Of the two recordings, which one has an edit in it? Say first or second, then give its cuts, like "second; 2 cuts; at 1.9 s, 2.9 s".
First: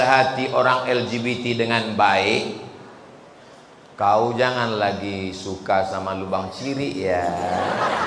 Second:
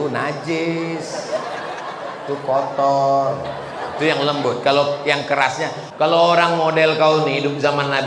second; 1 cut; at 5.8 s